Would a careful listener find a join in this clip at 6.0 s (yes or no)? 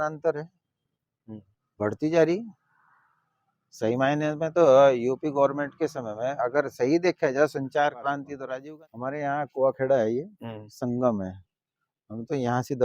no